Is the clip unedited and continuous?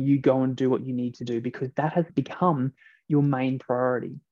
no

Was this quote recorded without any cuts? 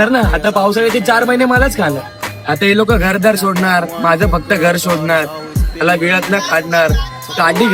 yes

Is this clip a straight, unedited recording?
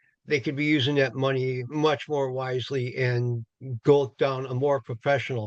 yes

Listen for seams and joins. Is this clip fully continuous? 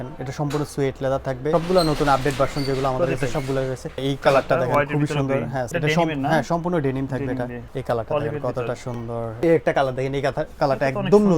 no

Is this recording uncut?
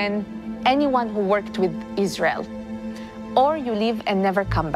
yes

